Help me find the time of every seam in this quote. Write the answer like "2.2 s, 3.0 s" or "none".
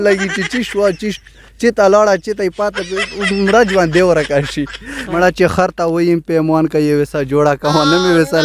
5.0 s